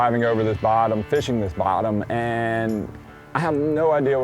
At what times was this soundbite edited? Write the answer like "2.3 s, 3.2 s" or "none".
none